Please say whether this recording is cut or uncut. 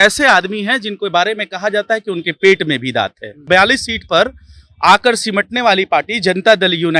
cut